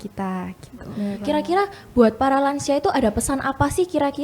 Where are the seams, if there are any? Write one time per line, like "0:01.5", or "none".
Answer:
0:01.2